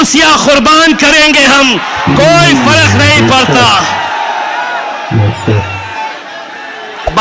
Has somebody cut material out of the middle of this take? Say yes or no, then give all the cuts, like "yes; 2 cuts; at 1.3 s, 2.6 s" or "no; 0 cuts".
no; 0 cuts